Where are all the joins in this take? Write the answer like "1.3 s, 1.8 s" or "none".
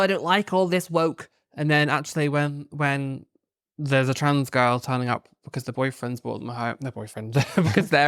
none